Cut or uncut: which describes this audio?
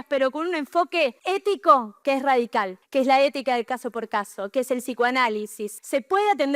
cut